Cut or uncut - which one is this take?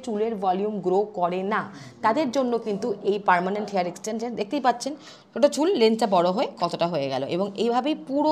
uncut